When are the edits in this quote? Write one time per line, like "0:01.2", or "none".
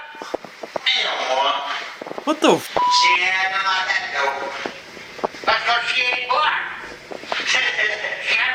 none

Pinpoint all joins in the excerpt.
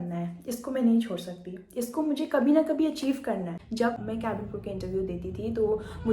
0:03.6

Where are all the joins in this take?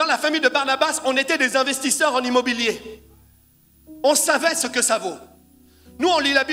none

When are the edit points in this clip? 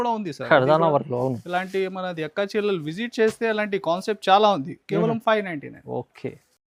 none

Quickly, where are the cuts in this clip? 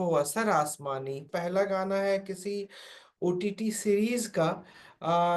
0:01.3

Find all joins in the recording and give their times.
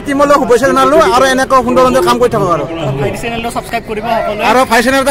none

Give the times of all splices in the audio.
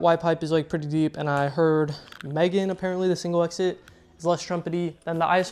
none

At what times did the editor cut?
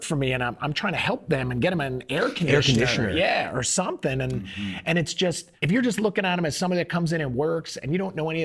0:05.5

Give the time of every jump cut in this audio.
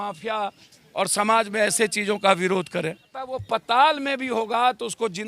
0:03.3

